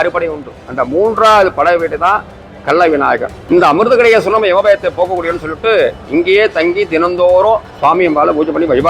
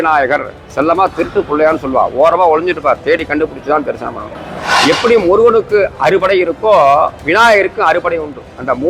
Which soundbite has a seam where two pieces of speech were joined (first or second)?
first